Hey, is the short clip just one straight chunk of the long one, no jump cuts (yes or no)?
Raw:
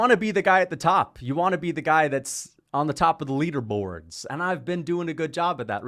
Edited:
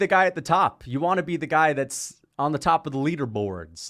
yes